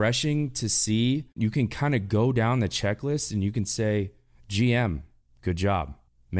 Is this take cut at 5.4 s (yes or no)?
no